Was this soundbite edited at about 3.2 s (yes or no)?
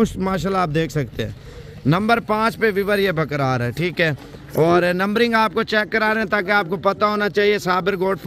no